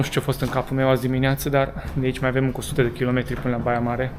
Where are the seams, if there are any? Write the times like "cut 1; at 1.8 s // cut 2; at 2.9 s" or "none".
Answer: none